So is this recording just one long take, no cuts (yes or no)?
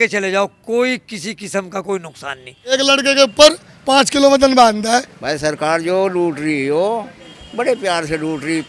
no